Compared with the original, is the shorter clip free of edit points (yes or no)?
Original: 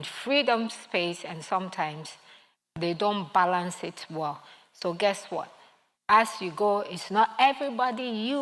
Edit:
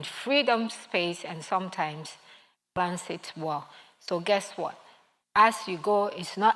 no